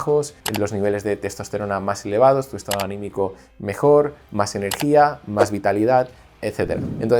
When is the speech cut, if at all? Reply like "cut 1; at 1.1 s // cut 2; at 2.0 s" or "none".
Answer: none